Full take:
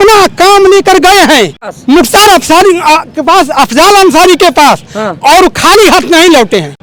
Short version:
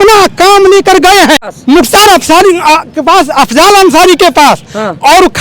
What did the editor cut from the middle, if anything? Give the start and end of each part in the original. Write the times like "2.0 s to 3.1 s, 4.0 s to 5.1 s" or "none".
1.5 s to 1.7 s